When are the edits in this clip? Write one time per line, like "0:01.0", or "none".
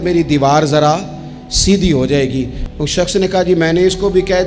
0:02.6